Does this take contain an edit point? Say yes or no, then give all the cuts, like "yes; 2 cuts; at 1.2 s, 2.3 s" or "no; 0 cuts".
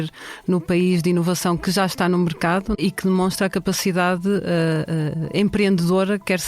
yes; 1 cut; at 2.8 s